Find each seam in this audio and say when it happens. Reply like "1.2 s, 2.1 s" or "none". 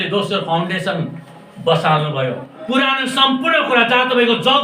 2.6 s